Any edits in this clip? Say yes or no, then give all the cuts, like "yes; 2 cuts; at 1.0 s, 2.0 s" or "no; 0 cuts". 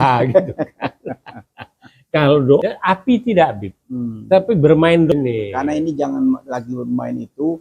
yes; 2 cuts; at 2.6 s, 5.1 s